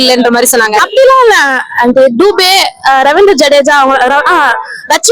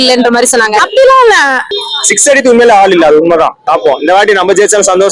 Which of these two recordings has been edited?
second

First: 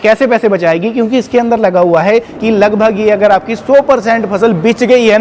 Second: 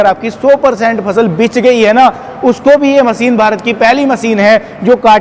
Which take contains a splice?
first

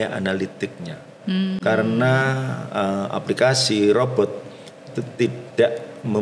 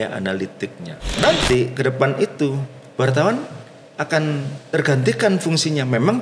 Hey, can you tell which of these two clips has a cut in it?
second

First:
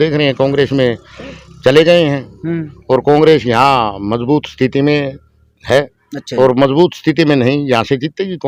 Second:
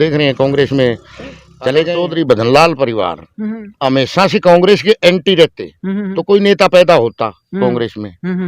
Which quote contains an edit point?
second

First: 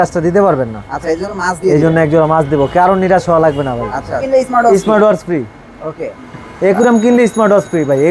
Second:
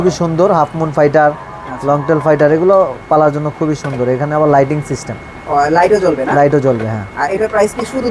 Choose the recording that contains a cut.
first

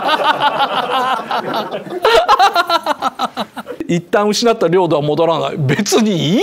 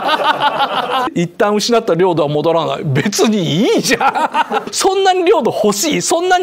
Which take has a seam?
second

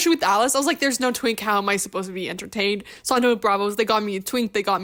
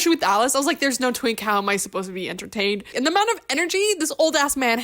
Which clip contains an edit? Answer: second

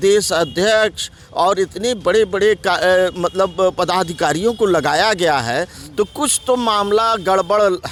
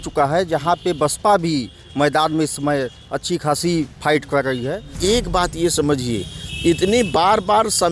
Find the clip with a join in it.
second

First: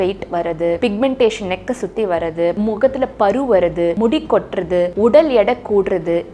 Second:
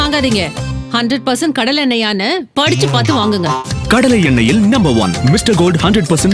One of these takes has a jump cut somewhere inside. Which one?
first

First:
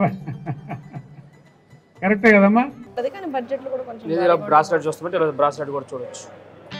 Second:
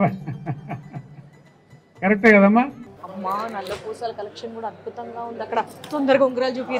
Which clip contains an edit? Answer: second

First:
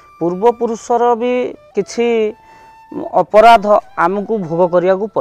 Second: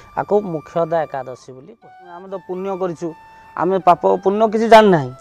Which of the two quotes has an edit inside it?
second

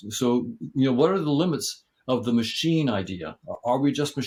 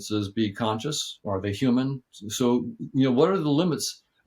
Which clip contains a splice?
second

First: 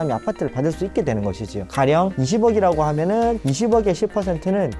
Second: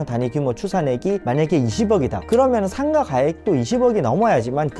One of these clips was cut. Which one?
first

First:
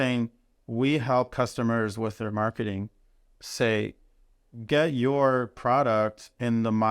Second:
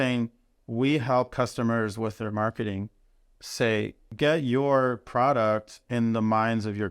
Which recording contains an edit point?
second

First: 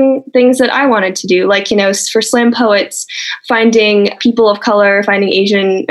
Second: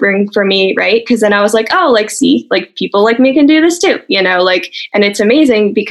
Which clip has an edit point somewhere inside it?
first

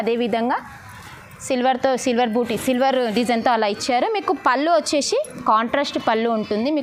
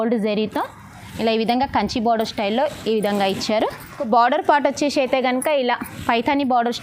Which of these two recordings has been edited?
second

